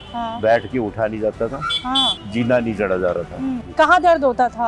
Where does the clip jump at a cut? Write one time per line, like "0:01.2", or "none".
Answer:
0:02.2
0:03.6

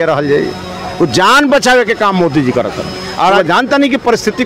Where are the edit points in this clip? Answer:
0:03.4

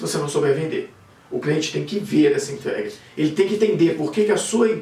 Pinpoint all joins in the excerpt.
none

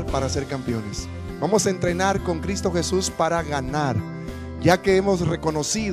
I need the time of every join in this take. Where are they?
0:02.4

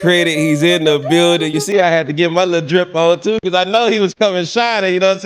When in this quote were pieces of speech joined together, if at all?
0:01.5

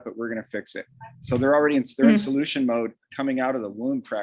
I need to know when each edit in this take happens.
none

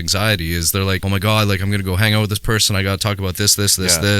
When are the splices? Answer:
0:01.0

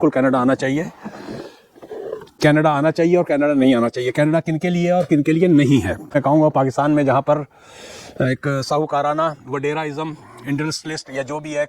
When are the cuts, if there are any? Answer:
0:02.3
0:06.1

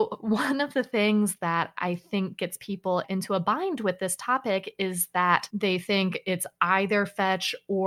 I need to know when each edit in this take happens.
0:05.5

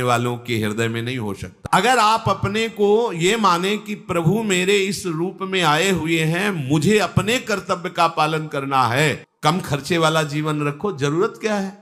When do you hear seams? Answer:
0:01.5
0:09.3

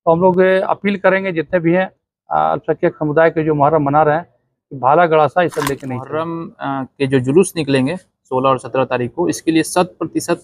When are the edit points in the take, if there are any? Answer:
0:06.0

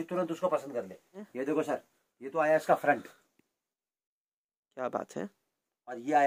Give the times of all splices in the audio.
0:01.3

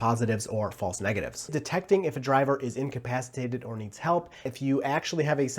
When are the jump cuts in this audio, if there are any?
0:01.6
0:04.5

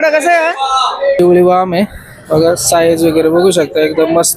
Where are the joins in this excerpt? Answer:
0:01.2

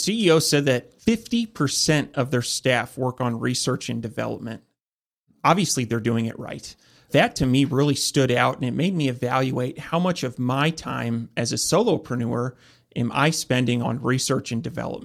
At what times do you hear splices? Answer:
0:00.9
0:07.1
0:13.8

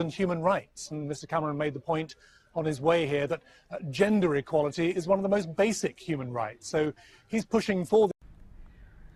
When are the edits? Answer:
none

